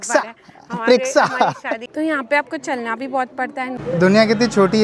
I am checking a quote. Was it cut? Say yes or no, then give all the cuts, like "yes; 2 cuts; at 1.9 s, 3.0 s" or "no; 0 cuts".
yes; 2 cuts; at 1.8 s, 3.8 s